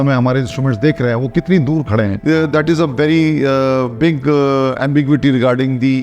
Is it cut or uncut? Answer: uncut